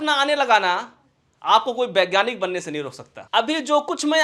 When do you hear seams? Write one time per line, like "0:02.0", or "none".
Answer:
0:03.2